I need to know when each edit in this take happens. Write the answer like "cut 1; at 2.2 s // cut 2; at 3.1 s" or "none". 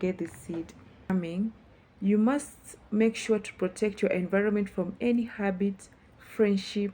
cut 1; at 1.1 s